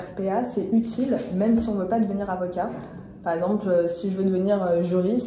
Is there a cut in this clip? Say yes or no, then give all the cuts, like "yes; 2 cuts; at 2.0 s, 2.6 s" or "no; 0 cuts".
no; 0 cuts